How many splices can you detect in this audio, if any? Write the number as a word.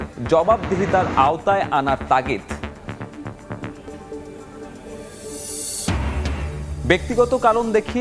zero